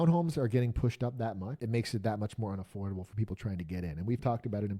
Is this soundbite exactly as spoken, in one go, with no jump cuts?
no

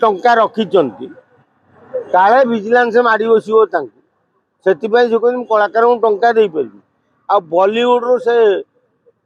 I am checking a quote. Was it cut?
no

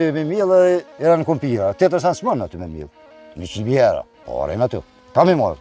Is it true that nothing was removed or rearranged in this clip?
no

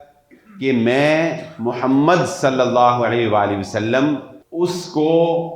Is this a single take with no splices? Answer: no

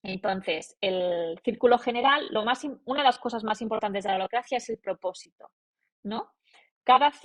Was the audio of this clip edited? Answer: no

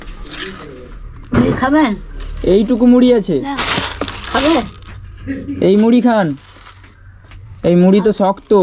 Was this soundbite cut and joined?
yes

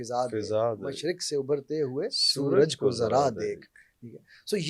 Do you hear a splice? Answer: no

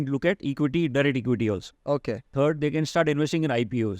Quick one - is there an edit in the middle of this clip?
yes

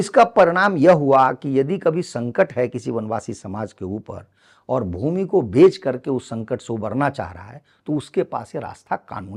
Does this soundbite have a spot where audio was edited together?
no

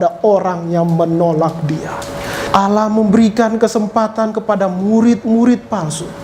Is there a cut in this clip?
yes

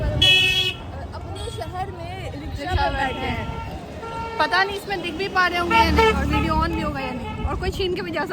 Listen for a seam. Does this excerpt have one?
no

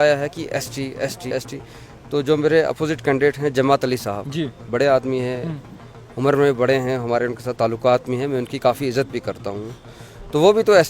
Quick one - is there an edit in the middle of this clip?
yes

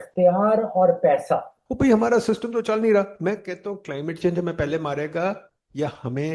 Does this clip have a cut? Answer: yes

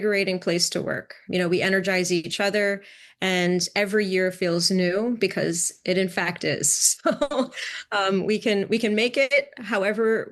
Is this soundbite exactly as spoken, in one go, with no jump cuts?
no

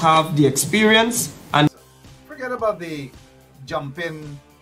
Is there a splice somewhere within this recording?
yes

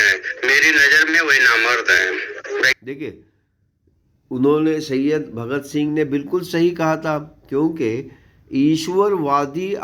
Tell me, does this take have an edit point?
no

